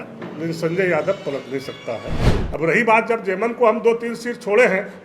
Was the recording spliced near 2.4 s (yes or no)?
yes